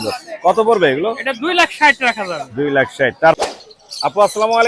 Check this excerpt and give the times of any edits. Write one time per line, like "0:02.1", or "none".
0:03.4